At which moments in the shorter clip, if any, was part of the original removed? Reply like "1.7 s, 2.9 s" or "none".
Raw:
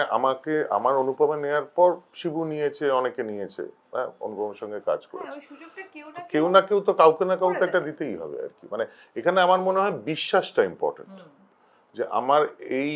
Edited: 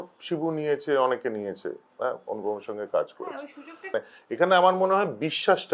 3.8 s